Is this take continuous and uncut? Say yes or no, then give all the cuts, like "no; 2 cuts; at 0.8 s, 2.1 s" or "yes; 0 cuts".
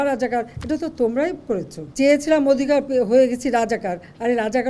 no; 1 cut; at 1.8 s